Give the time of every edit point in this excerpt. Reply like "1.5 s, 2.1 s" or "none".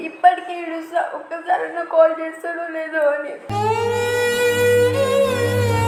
none